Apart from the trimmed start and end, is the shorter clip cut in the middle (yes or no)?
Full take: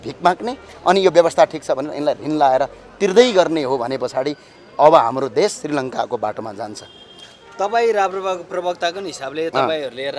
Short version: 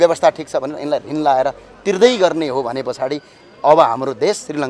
no